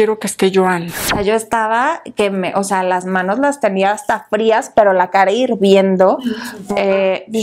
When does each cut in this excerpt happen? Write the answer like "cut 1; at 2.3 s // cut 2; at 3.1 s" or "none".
cut 1; at 1.1 s // cut 2; at 6.6 s

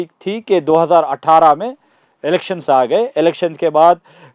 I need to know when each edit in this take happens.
none

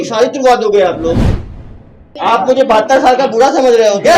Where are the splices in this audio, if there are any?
cut 1; at 1.6 s

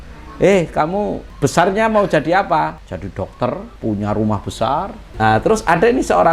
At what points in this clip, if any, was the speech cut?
cut 1; at 1.2 s // cut 2; at 2.9 s // cut 3; at 3.7 s // cut 4; at 5.0 s

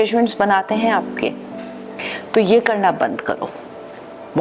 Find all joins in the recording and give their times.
none

